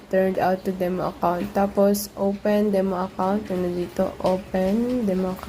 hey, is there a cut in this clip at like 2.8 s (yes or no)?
no